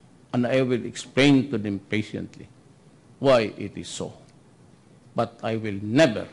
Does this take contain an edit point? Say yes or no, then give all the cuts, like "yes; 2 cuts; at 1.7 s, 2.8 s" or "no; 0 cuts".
no; 0 cuts